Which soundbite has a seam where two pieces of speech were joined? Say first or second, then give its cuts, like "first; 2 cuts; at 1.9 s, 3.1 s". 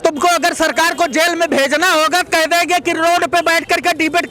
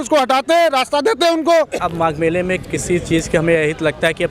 second; 1 cut; at 1.8 s